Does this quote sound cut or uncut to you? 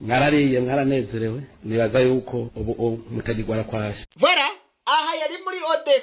uncut